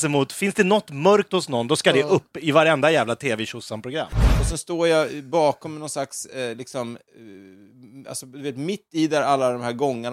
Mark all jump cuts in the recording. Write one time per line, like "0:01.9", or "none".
0:04.1